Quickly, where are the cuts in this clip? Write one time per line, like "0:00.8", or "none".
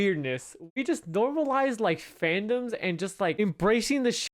0:03.4